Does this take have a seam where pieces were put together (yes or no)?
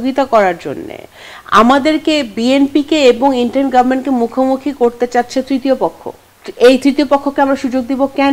no